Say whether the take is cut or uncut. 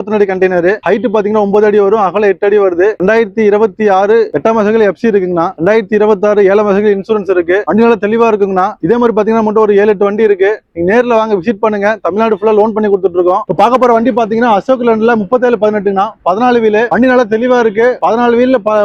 uncut